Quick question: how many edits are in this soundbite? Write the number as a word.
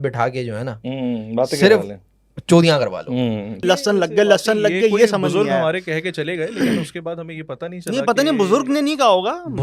one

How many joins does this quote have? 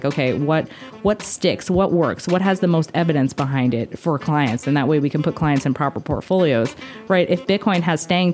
zero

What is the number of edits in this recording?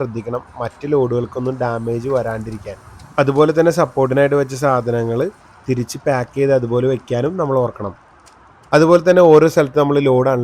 zero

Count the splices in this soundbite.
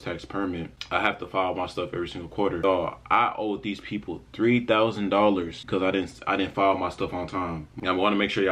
three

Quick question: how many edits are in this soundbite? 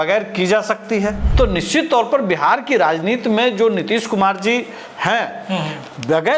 one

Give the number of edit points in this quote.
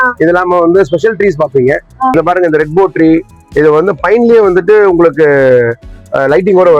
one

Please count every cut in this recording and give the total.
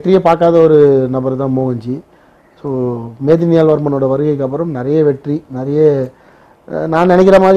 zero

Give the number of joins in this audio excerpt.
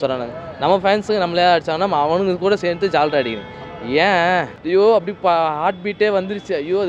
one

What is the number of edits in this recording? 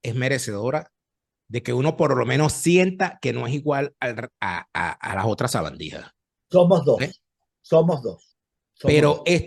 zero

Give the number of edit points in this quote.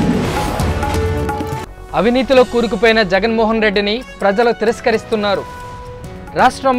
one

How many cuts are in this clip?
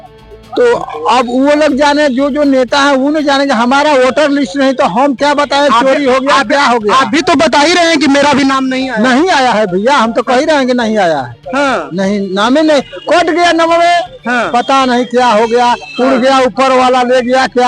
zero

